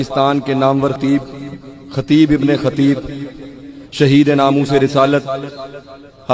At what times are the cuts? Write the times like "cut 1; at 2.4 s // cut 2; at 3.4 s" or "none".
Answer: cut 1; at 1.0 s